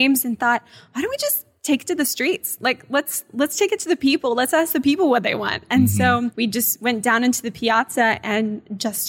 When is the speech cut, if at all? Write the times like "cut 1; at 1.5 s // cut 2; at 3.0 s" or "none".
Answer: cut 1; at 6.3 s